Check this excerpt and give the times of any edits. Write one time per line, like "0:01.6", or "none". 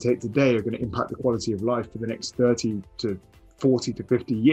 none